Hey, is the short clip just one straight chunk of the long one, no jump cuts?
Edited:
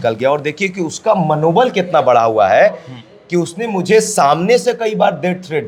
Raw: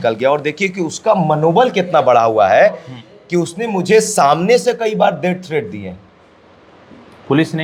yes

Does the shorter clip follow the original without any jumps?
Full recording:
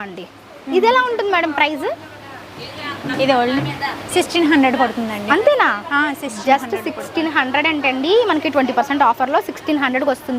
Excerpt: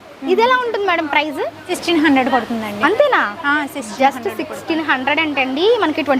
no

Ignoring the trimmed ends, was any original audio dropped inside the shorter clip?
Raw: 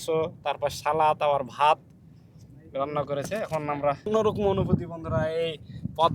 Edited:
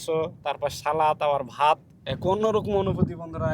yes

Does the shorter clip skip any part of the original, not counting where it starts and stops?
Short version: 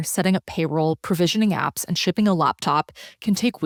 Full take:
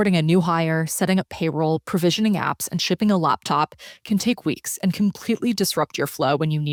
no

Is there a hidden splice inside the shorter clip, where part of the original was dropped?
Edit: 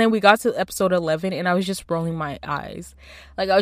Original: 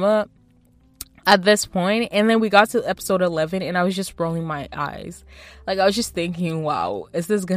no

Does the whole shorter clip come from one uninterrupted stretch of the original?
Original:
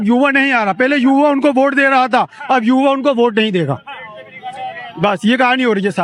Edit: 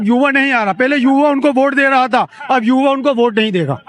yes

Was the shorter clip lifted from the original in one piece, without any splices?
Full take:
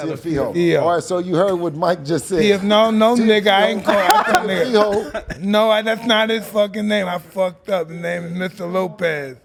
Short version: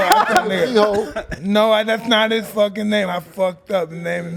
yes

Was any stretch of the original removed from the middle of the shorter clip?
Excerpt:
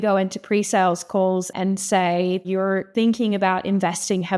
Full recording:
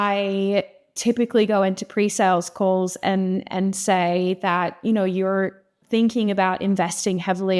yes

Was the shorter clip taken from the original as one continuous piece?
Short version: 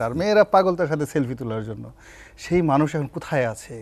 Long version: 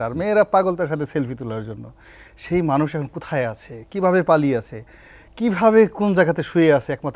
yes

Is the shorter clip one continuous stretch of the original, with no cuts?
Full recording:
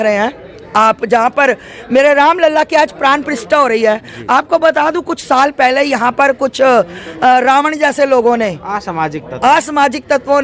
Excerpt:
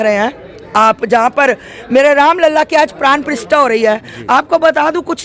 yes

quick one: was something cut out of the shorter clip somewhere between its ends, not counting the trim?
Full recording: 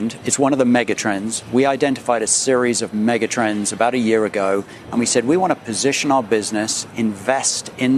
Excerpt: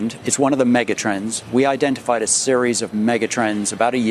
no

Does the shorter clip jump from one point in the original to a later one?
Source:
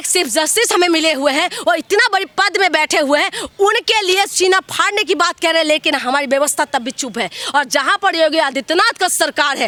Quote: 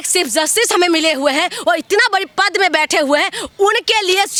no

